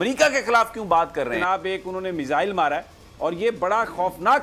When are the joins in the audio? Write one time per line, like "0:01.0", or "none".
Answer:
0:01.4